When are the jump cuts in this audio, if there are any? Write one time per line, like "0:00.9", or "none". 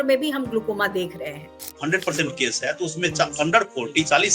0:01.7